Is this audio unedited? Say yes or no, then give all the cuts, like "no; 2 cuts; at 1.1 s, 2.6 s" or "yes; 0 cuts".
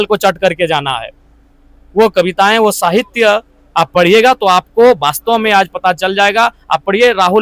yes; 0 cuts